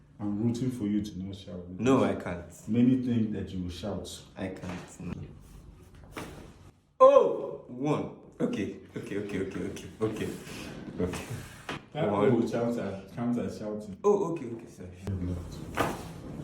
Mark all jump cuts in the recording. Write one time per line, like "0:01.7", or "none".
0:05.1
0:15.0